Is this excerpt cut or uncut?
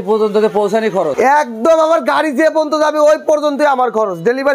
cut